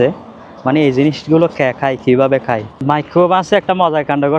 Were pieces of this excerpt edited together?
yes; 1 cut; at 2.7 s

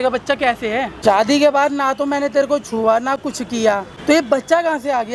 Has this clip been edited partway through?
yes; 2 cuts; at 0.9 s, 3.9 s

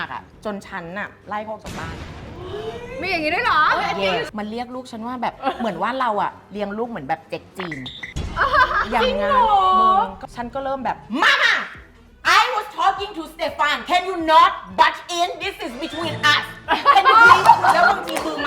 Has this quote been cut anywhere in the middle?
yes; 3 cuts; at 4.3 s, 5.4 s, 10.2 s

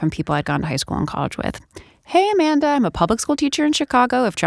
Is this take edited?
no; 0 cuts

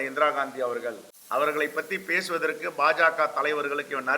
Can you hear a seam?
yes; 1 cut; at 1.1 s

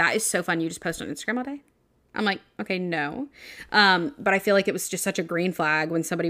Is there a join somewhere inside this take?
no; 0 cuts

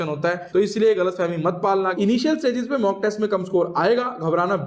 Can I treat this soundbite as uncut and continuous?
no; 1 cut; at 1.9 s

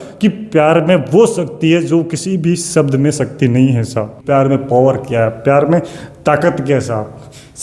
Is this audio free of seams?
no; 1 cut; at 4.1 s

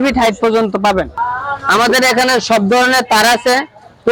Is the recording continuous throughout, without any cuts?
no; 1 cut; at 1.2 s

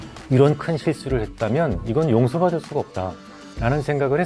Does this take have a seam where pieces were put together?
no; 0 cuts

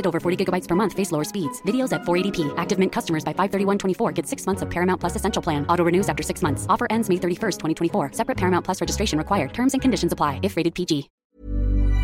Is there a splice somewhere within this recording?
yes; 1 cut; at 11.1 s

